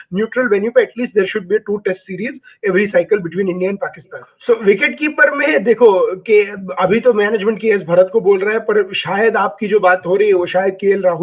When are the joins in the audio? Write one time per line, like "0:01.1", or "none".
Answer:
0:04.3